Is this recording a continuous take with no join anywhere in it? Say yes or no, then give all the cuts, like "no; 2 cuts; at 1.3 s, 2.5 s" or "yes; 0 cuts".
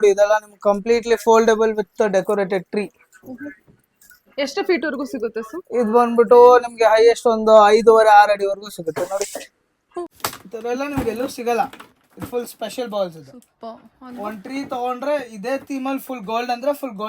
no; 1 cut; at 9.6 s